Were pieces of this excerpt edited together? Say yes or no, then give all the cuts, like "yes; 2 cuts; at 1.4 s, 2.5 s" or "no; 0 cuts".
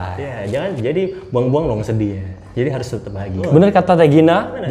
yes; 1 cut; at 3.4 s